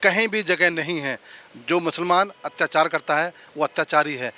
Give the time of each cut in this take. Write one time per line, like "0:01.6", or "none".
none